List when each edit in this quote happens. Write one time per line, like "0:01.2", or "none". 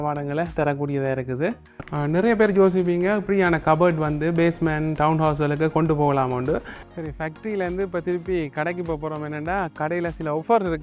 0:01.7
0:06.8